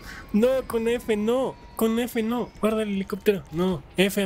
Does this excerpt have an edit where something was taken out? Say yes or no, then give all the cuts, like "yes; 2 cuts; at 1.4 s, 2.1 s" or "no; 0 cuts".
no; 0 cuts